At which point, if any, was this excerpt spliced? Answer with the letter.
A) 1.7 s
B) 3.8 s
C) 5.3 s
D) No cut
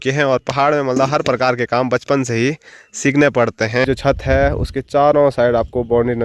B